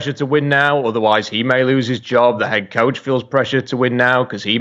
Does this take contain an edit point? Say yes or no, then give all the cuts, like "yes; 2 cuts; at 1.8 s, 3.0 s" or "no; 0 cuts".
no; 0 cuts